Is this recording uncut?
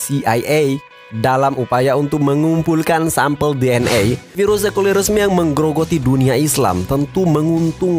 no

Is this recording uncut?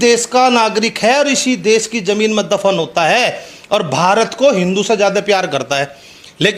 yes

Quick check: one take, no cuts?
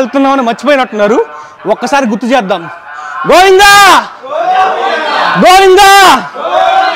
yes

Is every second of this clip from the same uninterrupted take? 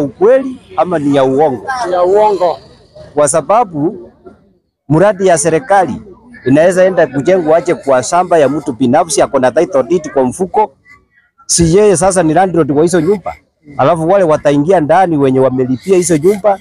yes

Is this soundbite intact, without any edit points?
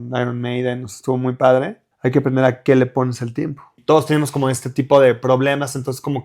no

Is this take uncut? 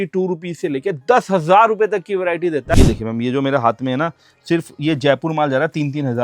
no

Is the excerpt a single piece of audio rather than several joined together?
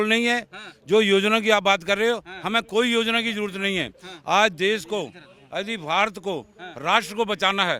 yes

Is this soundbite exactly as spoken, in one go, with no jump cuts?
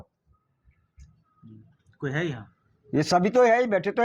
yes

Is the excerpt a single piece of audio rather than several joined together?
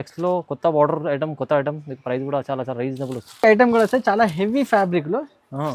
yes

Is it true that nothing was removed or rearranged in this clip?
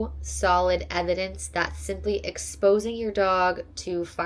yes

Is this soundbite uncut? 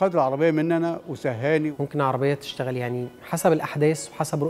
no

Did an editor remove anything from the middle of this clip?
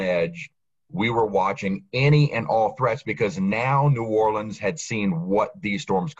no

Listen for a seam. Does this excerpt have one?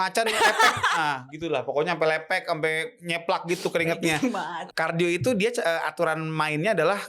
yes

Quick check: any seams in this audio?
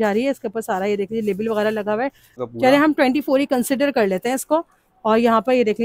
yes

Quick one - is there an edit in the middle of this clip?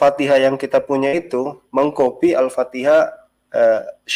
no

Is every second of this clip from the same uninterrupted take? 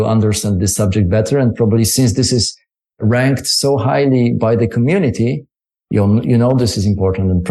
yes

